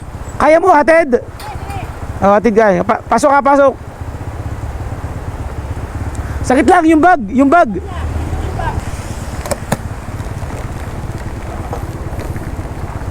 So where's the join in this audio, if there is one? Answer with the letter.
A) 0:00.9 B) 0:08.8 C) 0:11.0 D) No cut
B